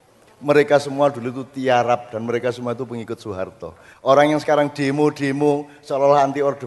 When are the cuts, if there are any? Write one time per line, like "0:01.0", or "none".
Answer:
none